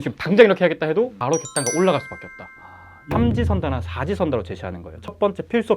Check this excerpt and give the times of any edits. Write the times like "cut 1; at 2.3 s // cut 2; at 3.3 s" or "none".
cut 1; at 1.2 s // cut 2; at 3.0 s